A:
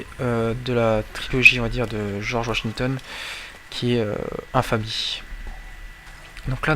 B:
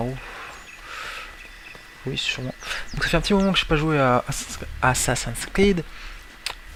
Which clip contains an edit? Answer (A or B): A